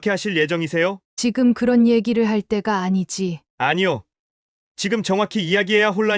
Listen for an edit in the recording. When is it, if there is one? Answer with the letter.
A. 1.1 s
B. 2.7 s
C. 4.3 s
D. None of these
A